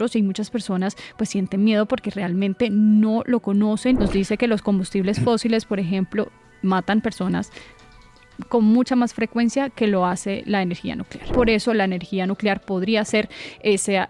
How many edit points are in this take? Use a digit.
2